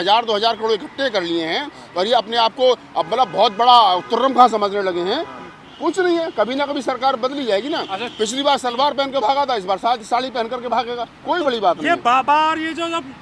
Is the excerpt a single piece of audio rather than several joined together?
yes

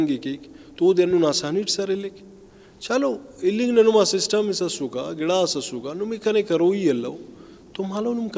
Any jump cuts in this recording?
no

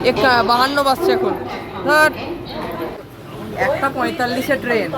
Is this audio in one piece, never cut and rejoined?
no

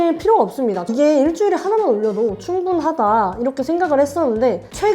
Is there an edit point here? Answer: yes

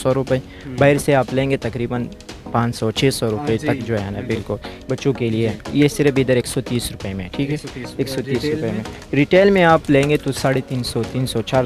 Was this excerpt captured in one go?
no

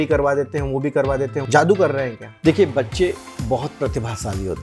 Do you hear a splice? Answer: yes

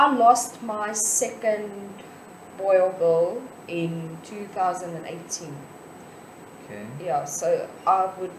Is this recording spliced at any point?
no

